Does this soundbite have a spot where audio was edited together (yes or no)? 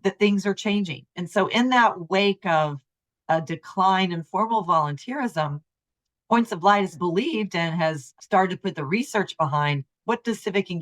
yes